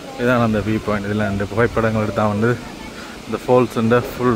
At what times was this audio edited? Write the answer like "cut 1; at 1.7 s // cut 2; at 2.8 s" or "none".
none